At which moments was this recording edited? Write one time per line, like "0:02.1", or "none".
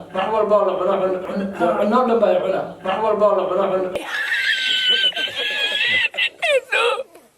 0:01.2
0:03.9